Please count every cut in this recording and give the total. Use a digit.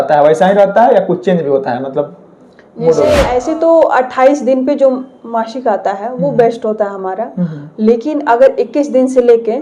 1